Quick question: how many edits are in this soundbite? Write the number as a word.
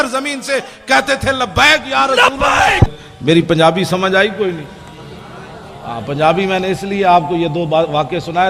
one